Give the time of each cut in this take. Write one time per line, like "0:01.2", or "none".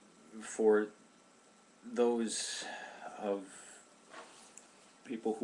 none